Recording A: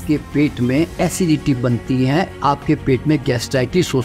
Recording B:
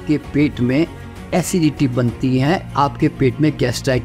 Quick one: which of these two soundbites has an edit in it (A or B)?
A